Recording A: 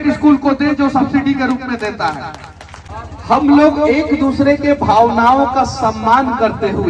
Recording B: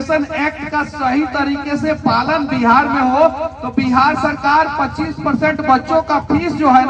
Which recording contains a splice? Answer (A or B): A